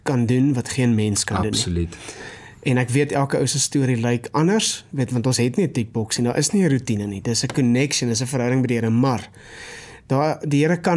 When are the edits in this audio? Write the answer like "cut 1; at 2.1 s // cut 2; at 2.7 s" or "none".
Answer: none

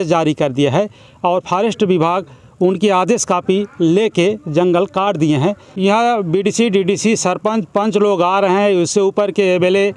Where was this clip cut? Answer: cut 1; at 5.7 s

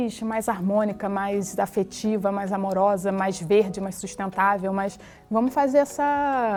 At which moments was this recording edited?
none

